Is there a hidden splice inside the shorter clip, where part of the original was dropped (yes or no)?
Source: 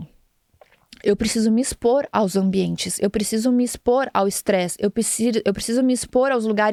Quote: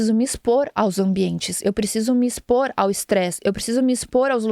yes